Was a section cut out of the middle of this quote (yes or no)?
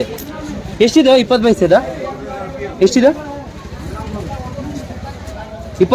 no